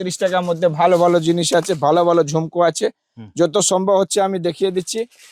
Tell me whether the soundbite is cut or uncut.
uncut